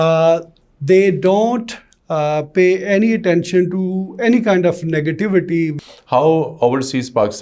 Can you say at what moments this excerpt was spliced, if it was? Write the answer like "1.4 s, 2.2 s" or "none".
5.7 s